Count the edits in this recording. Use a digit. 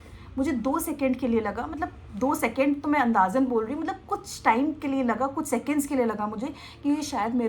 0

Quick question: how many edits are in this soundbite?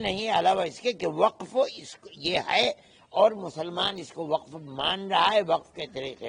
0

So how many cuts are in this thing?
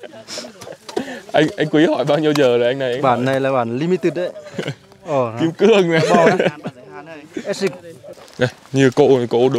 1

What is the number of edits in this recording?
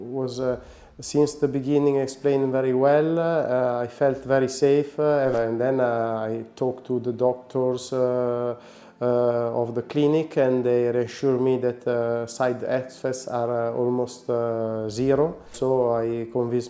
2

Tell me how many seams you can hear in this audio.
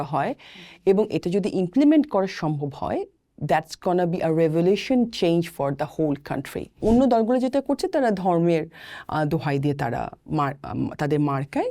1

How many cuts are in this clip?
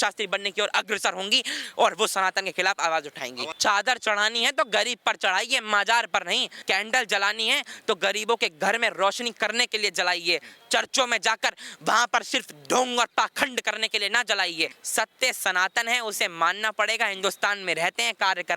3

